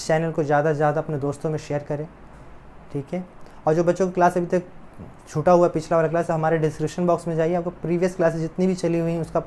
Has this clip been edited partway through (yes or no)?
no